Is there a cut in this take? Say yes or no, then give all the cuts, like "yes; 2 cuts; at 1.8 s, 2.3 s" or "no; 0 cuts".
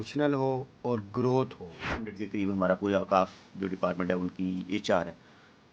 yes; 1 cut; at 2.2 s